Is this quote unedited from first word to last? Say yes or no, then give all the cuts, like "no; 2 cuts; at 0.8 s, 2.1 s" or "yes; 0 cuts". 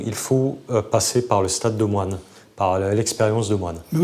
yes; 0 cuts